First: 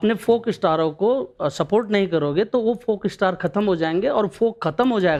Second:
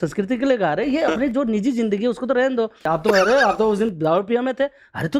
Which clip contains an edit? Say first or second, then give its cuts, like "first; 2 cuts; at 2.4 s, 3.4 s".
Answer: second; 1 cut; at 2.8 s